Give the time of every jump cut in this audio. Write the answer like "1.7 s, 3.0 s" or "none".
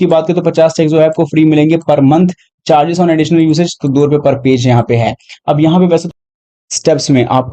6.1 s